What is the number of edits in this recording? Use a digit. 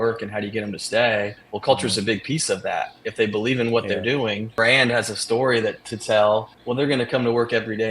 2